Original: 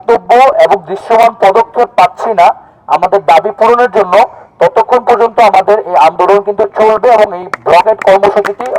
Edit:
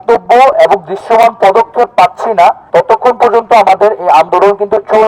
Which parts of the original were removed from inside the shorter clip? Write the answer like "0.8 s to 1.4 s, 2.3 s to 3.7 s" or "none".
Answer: 2.6 s to 4.5 s